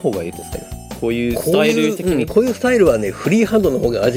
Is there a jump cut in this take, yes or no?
no